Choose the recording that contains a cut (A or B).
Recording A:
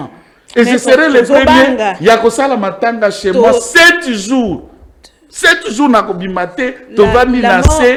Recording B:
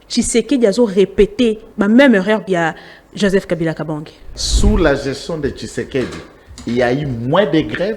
B